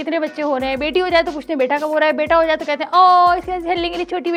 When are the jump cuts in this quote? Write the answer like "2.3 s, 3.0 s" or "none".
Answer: none